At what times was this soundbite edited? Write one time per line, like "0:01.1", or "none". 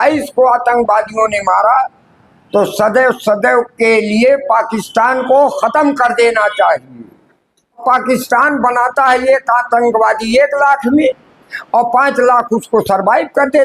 0:07.8